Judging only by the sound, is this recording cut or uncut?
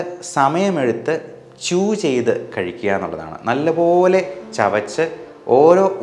uncut